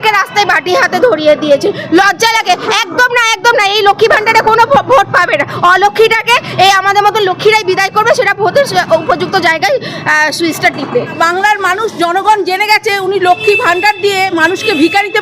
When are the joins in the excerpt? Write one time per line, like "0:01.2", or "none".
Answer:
0:11.1